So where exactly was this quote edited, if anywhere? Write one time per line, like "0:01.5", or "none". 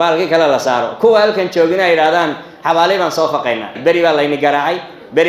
0:03.8